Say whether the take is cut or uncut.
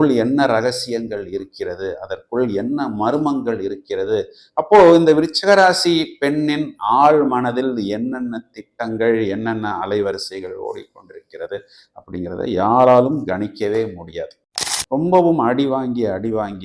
cut